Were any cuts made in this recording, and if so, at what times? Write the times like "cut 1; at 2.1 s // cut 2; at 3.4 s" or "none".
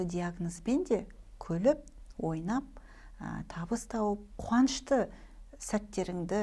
cut 1; at 4.3 s